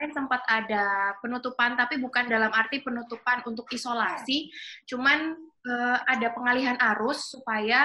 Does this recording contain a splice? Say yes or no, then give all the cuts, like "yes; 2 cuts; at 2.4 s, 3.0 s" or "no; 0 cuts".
no; 0 cuts